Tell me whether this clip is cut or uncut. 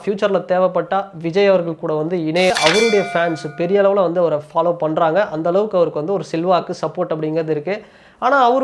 cut